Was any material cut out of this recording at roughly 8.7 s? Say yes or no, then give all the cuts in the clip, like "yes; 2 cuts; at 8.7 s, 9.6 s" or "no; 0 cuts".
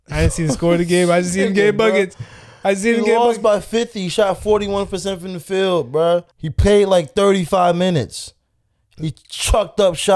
no; 1 cut; at 6.3 s